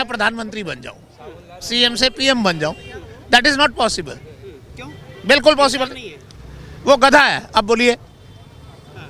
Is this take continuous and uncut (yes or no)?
yes